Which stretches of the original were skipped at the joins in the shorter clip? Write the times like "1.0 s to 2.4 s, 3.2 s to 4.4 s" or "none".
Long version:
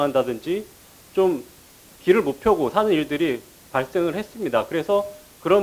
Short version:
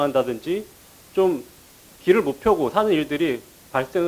none

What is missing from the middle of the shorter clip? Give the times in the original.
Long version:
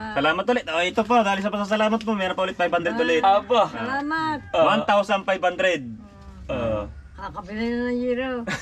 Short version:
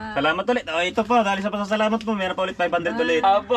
none

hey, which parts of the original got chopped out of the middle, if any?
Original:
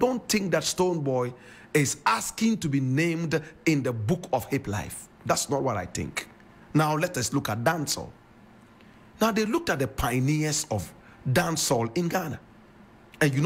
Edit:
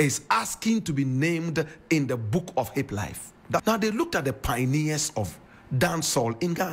5.4 s to 9.2 s

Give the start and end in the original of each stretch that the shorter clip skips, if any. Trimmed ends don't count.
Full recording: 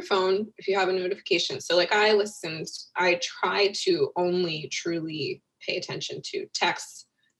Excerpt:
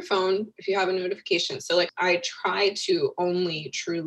1.9 s to 2.9 s

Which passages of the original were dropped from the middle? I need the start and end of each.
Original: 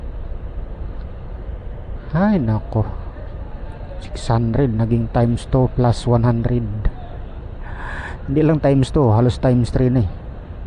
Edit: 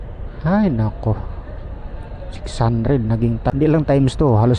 5.2 s to 8.2 s

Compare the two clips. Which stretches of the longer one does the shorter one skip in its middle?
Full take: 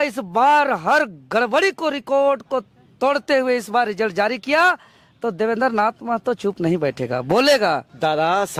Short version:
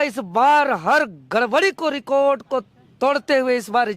none

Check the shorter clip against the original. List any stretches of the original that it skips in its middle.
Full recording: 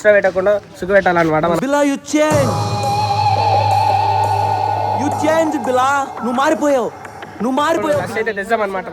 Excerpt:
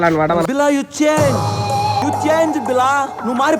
3.1 s to 5.0 s

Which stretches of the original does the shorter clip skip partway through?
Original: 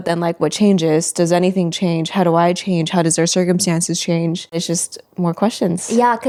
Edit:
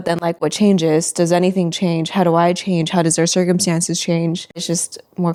none

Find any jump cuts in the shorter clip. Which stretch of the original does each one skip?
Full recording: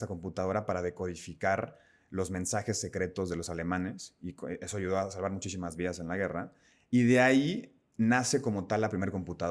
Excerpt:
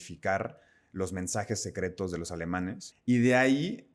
4.1 s to 6.7 s

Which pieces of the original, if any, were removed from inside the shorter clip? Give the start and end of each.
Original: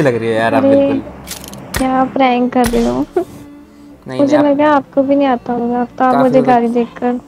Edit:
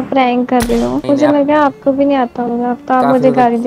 3.1 s to 4.1 s

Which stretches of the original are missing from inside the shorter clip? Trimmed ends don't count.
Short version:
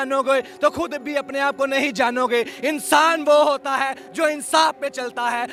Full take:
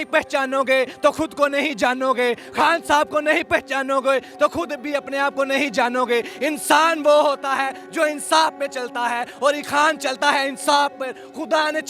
none

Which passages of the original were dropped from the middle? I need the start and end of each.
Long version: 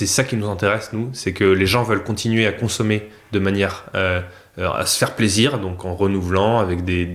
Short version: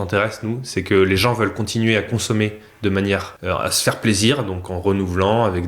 3.8 s to 4.5 s

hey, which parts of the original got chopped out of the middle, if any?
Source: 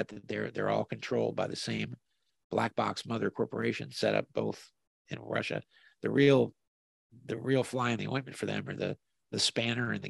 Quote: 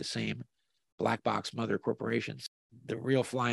3.9 s to 6.8 s

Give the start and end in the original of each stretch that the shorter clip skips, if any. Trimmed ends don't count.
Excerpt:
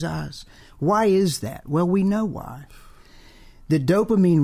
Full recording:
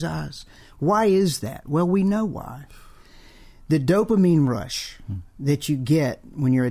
none

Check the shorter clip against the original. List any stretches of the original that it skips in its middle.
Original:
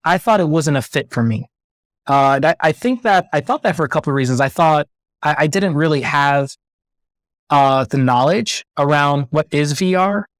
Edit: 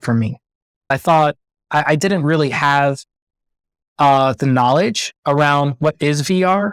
2.0 s to 4.4 s

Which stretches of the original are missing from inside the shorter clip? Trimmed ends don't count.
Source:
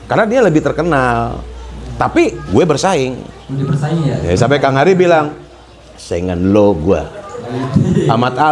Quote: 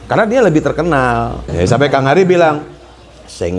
1.5 s to 4.2 s

